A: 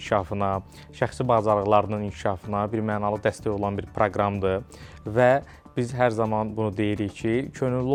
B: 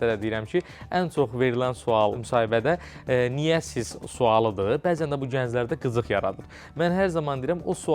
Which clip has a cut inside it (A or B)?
B